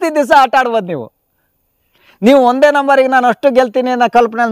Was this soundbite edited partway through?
no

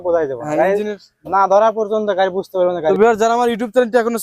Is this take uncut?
no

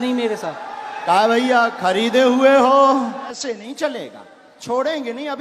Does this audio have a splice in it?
yes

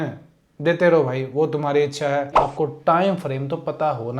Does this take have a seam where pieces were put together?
yes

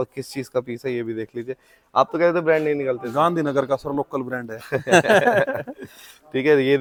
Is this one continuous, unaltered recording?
yes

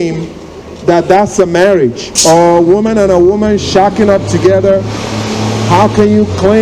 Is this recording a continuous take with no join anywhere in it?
yes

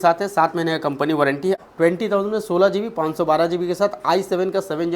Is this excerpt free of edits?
no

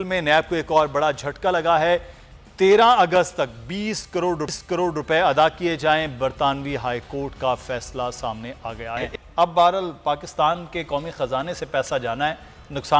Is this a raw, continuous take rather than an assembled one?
yes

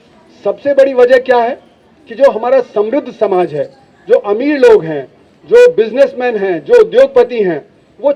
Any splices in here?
no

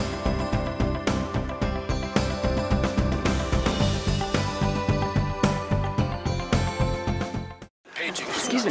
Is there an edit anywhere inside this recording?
yes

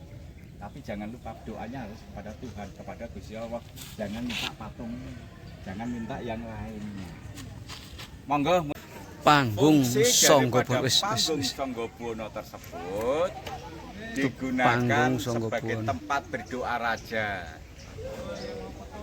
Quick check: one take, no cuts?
no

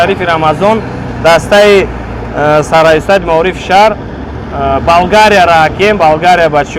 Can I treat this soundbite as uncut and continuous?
yes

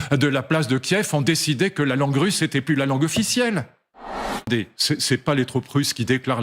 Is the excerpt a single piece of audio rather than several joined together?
no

